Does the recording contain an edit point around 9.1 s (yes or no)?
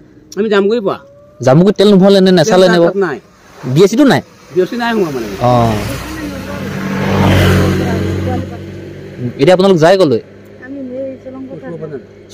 no